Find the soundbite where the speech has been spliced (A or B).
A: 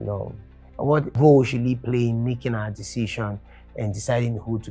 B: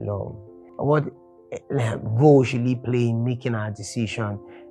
A